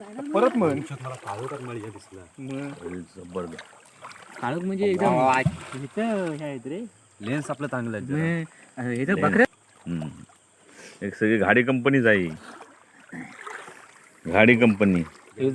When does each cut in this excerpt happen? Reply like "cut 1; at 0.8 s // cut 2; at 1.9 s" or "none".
cut 1; at 9.5 s